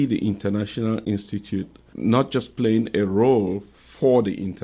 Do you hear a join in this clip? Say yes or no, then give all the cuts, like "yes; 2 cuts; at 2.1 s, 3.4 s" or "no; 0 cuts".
yes; 1 cut; at 1.8 s